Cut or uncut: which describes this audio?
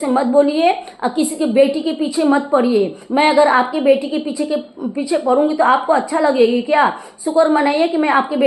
uncut